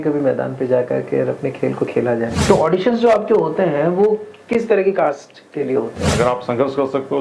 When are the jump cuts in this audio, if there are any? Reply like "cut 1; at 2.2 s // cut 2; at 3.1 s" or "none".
cut 1; at 2.4 s // cut 2; at 6.0 s